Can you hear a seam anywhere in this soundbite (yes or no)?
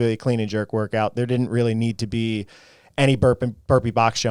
no